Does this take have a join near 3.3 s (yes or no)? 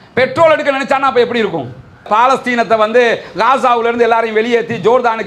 no